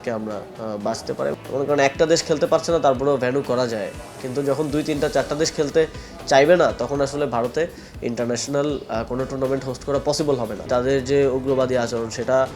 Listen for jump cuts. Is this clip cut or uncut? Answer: cut